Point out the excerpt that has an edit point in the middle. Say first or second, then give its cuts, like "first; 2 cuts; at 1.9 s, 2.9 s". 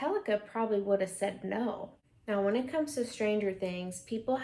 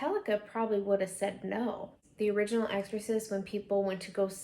second; 1 cut; at 2.0 s